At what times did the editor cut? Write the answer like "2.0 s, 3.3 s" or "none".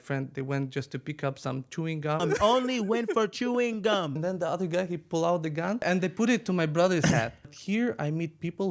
2.2 s, 4.2 s, 5.9 s, 7.6 s